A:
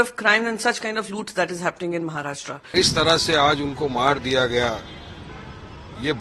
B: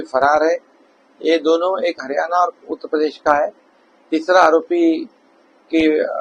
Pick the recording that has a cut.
A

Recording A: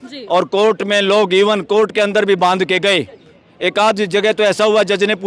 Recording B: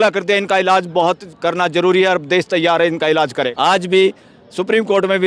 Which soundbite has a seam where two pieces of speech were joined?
B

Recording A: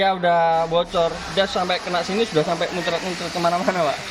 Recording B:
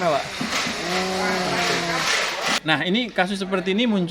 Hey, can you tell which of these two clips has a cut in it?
B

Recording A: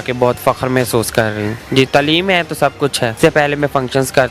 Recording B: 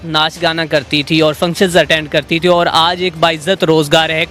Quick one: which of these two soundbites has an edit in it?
A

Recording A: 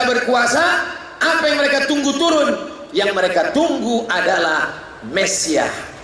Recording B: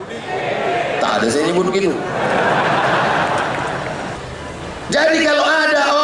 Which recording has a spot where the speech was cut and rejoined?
B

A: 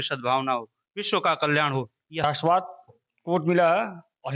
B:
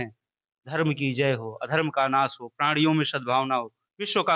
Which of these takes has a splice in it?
A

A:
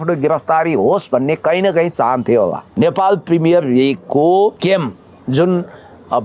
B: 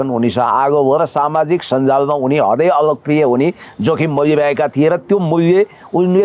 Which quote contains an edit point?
A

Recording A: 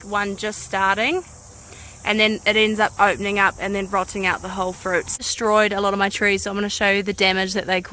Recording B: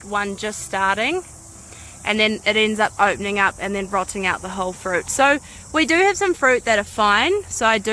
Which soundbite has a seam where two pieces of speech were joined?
A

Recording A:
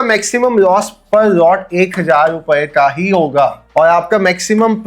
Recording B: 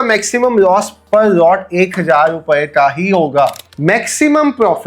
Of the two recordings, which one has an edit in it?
B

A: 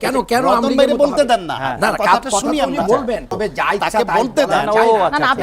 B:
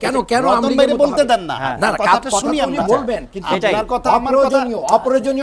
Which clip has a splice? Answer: A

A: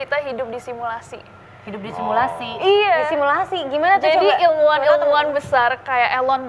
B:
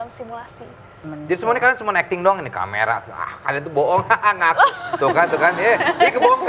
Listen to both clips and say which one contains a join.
B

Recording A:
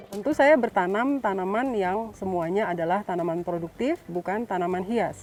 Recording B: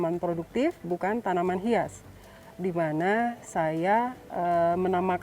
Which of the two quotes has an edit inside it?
B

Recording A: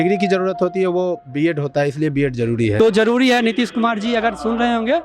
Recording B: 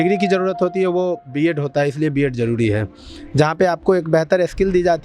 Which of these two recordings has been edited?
A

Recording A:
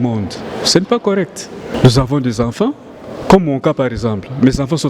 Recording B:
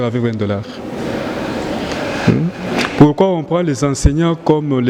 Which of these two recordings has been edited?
A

